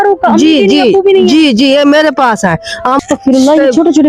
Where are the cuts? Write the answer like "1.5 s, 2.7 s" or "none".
3.0 s